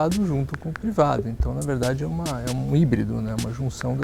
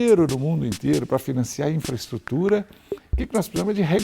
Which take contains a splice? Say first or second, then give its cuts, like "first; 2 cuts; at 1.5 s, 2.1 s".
second; 1 cut; at 1.1 s